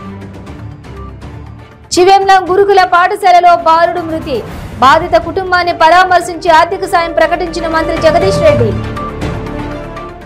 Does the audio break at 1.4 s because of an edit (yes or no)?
yes